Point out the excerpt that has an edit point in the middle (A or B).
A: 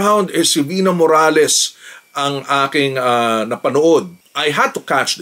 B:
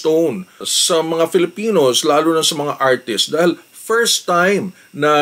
A